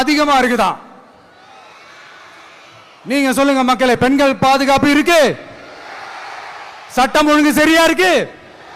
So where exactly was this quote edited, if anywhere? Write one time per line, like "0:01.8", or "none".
none

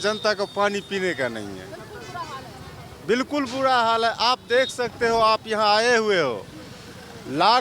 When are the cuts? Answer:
none

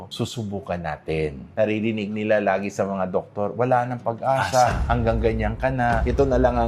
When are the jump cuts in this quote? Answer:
0:01.5

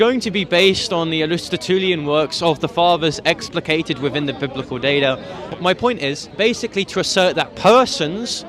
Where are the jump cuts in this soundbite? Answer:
0:05.5
0:06.3

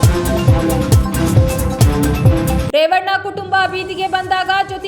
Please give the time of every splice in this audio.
0:01.0
0:02.6

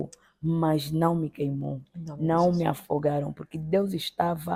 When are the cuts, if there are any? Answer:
none

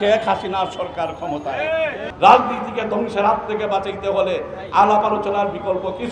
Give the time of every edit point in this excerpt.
0:02.0

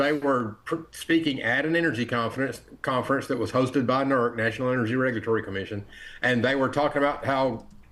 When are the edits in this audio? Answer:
none

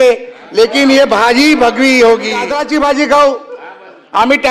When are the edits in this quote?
0:02.6

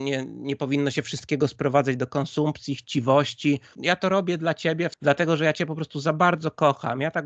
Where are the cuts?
0:03.7
0:04.9

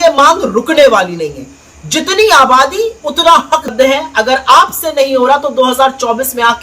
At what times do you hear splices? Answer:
0:03.7

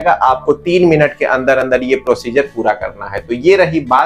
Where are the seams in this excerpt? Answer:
none

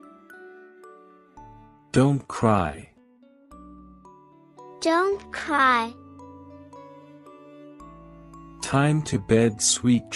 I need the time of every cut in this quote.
0:01.7
0:02.8
0:04.5
0:06.0
0:08.2

